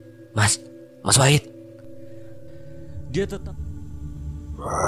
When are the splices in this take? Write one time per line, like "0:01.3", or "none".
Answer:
0:03.4